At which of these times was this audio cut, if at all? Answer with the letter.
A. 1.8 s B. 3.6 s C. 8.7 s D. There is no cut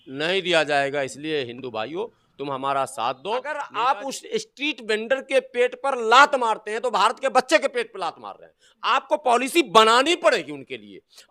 B